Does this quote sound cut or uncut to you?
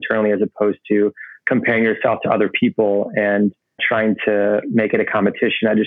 cut